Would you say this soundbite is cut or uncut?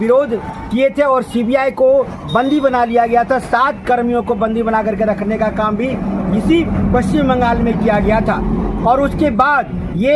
uncut